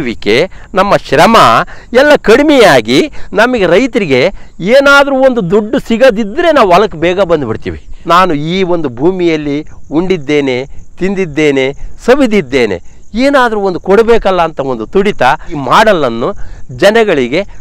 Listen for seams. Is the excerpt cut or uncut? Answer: cut